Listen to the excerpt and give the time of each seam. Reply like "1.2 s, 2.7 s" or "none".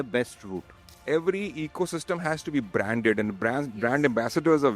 0.9 s